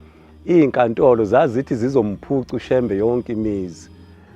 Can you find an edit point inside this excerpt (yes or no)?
no